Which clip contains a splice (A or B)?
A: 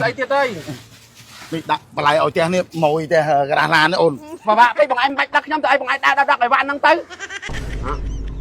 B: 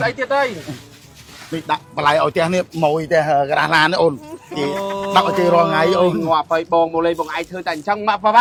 A